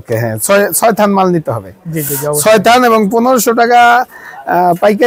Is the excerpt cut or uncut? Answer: uncut